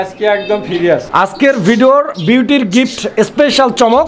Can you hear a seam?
yes; 1 cut; at 1.3 s

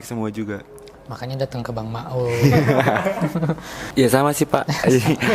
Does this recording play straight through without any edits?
no; 1 cut; at 3.7 s

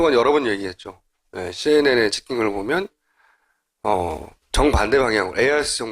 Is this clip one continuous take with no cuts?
no; 1 cut; at 4.4 s

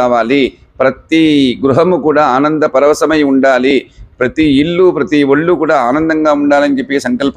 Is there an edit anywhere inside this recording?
no; 0 cuts

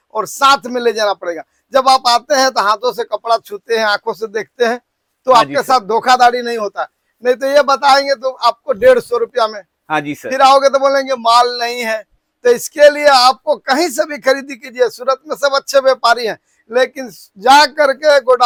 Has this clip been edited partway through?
no; 0 cuts

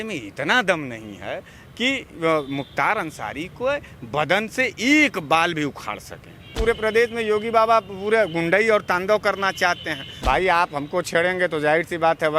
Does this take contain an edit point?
yes; 2 cuts; at 6.5 s, 10.2 s

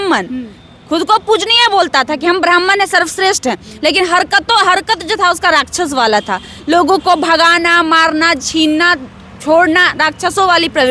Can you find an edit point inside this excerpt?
no; 0 cuts

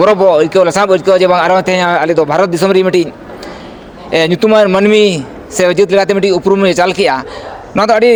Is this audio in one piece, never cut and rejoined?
yes; 0 cuts

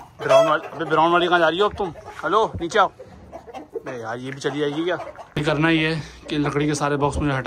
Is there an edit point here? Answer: yes; 1 cut; at 5.2 s

